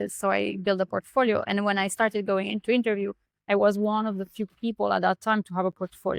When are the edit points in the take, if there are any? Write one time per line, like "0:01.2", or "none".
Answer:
none